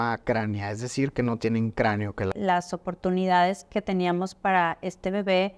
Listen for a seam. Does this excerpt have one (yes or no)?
yes